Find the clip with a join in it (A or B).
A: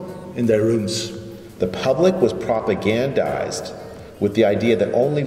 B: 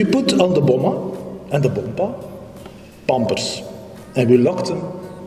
A